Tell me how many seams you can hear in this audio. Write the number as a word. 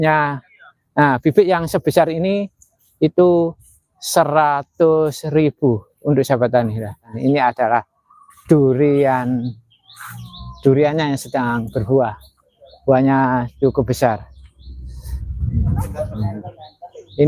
one